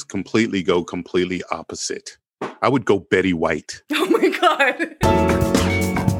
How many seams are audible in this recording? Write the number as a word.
one